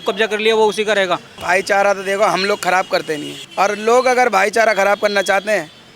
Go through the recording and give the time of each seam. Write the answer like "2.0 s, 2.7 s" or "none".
1.4 s, 3.4 s

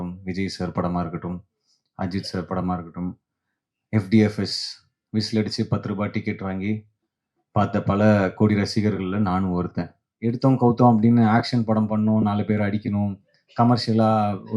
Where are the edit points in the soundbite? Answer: 10.1 s

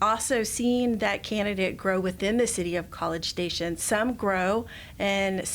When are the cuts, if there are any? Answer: 3.8 s

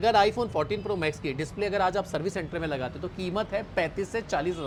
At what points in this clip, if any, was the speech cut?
none

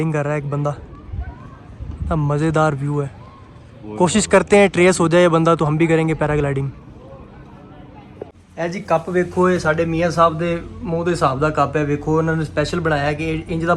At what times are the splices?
8.4 s

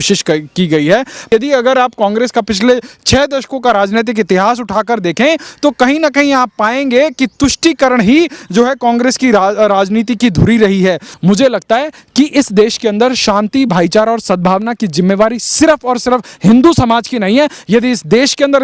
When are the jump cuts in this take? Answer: 1.3 s, 11.1 s

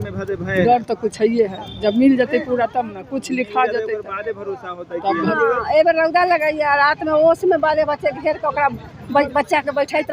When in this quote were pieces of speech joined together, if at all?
5.3 s

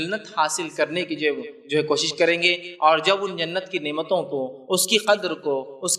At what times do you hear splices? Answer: none

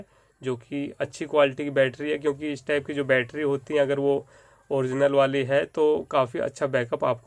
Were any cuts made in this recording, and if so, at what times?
none

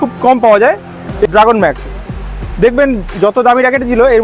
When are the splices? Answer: 1.3 s

